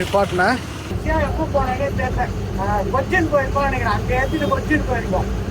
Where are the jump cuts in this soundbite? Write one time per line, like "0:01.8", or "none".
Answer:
0:01.0